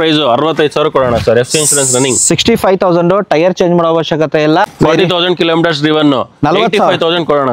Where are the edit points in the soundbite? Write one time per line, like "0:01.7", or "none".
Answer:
0:04.7